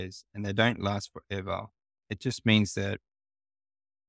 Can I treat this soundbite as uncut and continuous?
yes; 0 cuts

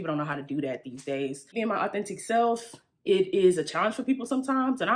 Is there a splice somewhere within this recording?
yes; 1 cut; at 1.6 s

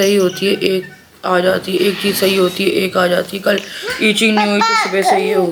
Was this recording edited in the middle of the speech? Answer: no; 0 cuts

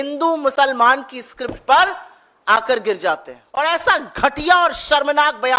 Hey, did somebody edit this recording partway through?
yes; 1 cut; at 3.5 s

